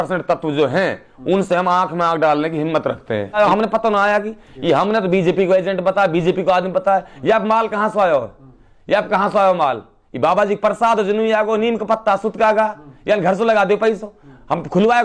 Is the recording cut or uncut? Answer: cut